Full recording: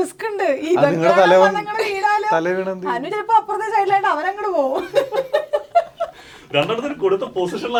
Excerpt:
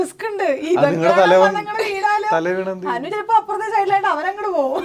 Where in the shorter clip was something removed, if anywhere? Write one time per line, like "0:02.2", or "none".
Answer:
none